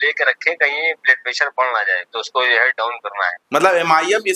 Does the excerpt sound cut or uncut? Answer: uncut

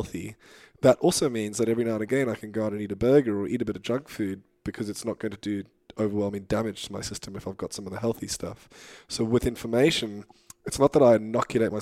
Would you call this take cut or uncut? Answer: uncut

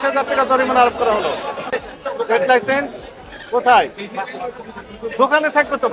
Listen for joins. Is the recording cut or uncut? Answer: cut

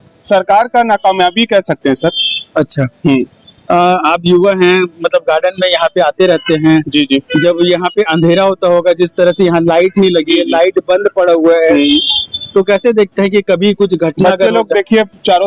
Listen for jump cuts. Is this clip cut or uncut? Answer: uncut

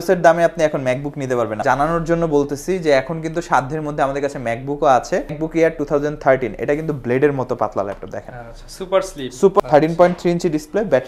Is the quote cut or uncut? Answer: cut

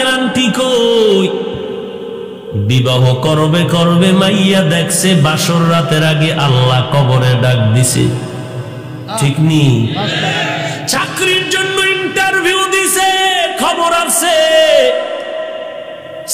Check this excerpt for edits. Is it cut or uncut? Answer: uncut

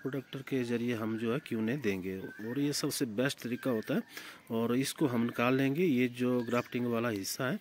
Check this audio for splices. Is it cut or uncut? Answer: uncut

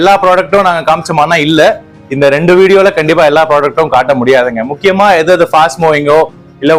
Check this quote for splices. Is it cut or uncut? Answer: uncut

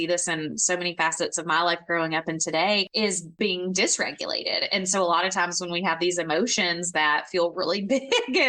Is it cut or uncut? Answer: cut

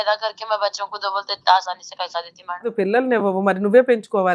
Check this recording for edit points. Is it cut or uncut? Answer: cut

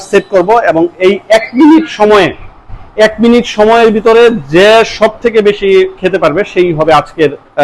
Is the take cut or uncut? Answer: uncut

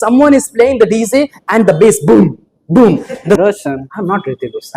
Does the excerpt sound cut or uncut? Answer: cut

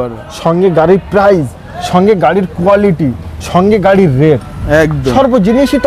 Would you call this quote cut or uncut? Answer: uncut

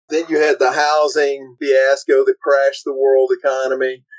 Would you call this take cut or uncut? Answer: cut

